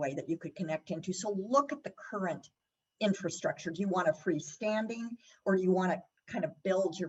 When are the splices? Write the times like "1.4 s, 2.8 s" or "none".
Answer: none